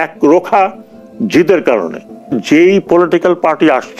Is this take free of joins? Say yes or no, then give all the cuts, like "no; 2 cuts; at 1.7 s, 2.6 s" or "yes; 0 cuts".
no; 1 cut; at 2.4 s